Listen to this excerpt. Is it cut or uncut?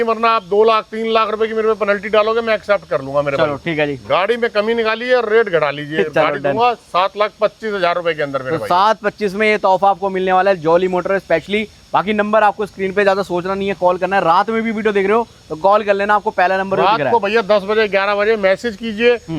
uncut